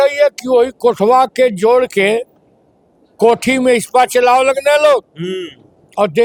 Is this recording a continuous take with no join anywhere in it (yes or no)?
yes